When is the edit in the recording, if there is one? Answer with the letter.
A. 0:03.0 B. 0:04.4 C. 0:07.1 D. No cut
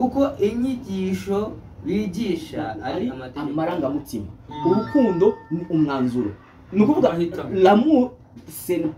A